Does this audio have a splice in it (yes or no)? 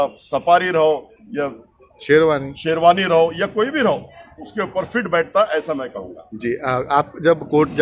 no